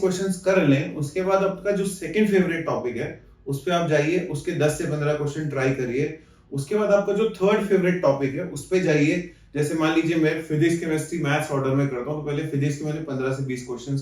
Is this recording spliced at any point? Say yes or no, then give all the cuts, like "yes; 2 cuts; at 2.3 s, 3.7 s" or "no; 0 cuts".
no; 0 cuts